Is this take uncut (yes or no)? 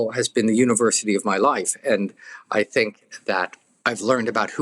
no